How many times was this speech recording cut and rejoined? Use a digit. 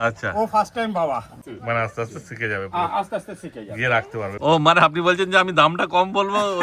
2